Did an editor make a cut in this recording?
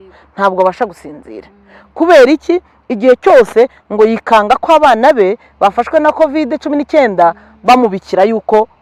no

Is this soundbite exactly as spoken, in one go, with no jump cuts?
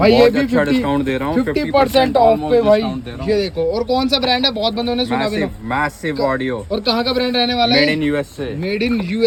yes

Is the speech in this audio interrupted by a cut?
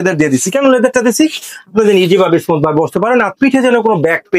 no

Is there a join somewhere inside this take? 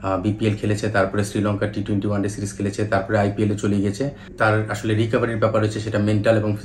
yes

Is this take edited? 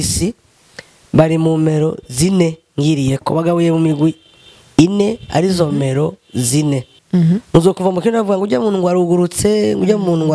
yes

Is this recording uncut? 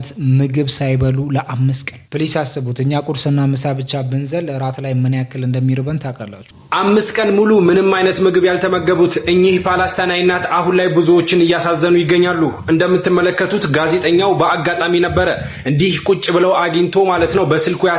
yes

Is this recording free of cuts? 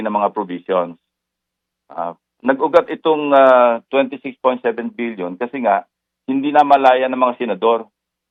yes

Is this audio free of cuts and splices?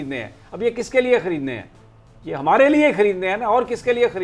yes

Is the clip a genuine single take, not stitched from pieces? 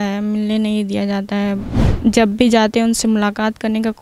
no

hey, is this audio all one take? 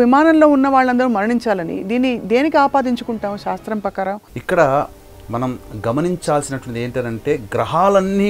no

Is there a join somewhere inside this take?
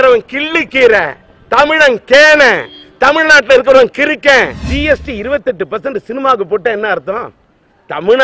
yes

